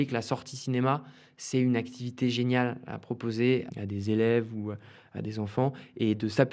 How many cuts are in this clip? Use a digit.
1